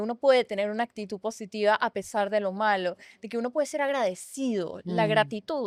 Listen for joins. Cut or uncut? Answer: uncut